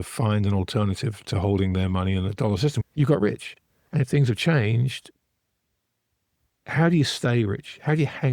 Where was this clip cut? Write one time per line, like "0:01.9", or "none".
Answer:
0:02.8